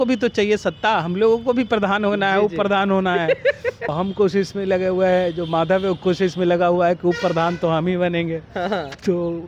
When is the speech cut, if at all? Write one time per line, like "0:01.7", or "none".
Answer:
0:03.9